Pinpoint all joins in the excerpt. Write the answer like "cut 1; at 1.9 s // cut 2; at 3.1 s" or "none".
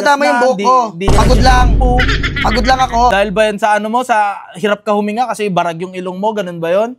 cut 1; at 3.1 s

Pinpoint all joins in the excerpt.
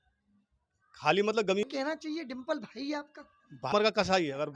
cut 1; at 1.6 s // cut 2; at 3.7 s

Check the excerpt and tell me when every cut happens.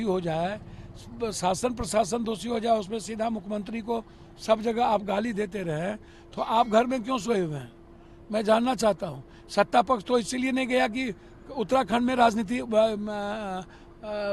none

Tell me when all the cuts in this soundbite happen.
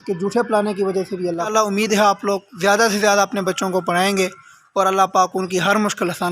cut 1; at 1.5 s

